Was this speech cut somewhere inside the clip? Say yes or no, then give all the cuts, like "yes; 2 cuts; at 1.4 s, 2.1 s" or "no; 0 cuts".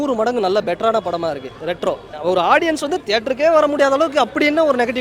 yes; 1 cut; at 2.1 s